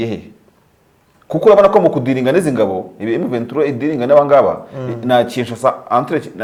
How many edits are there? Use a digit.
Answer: 0